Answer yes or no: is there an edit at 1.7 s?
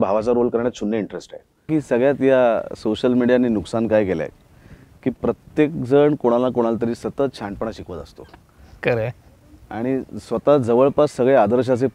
yes